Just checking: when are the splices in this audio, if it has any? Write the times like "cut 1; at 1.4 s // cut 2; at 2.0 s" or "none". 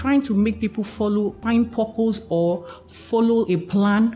cut 1; at 1.4 s

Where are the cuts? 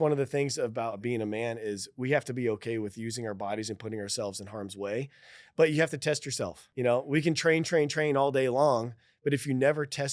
cut 1; at 1.0 s // cut 2; at 6.7 s

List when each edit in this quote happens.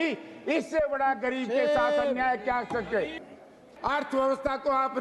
cut 1; at 3.5 s

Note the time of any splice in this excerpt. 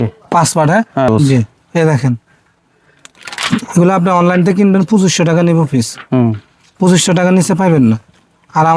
cut 1; at 1.1 s

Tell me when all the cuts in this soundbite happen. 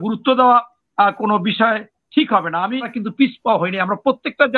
cut 1; at 3.0 s

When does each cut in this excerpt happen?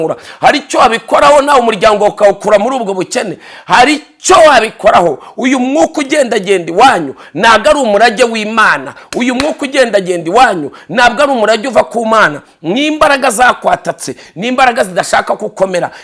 none

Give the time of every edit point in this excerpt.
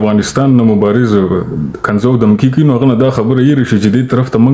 none

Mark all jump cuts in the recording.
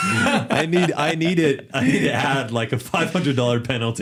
none

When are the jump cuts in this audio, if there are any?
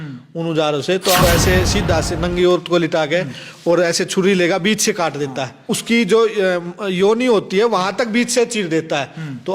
cut 1; at 1.2 s // cut 2; at 5.6 s

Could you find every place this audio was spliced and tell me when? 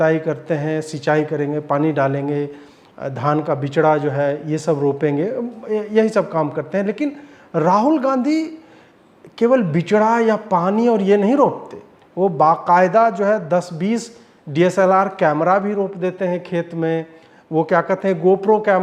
none

